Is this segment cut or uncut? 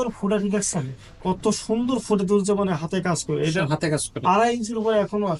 uncut